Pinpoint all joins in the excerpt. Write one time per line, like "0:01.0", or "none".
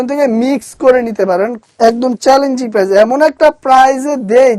0:01.6